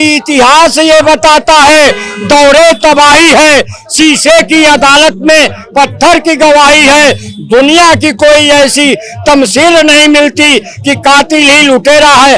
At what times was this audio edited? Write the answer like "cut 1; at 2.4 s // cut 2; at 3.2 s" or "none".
none